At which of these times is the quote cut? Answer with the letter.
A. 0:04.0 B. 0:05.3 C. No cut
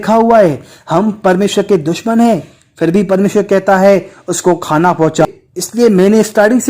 B